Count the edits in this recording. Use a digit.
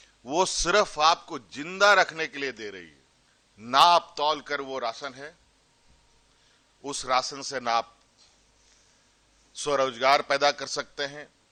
0